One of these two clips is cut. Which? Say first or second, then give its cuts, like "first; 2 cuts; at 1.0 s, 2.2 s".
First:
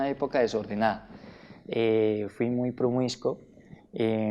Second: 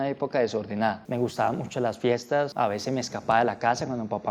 second; 2 cuts; at 1.0 s, 2.5 s